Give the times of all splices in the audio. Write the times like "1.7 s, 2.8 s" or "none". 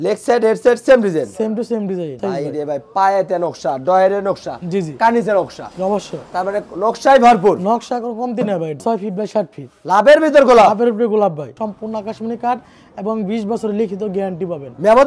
2.2 s, 8.8 s, 11.5 s